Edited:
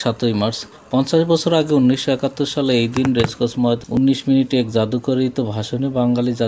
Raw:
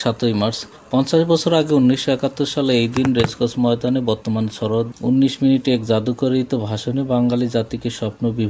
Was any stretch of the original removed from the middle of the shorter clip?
yes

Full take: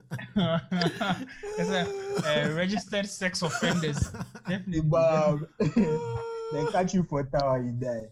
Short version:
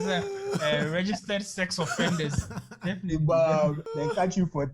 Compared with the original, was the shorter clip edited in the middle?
yes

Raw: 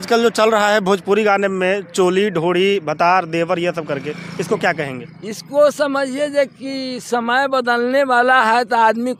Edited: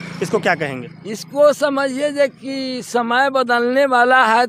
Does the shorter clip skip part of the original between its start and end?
no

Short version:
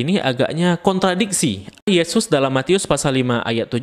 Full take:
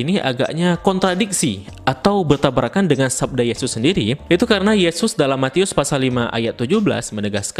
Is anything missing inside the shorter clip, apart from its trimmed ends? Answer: yes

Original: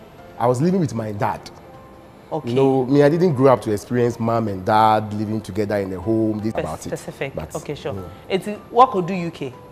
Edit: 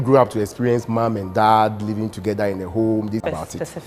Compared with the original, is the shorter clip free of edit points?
yes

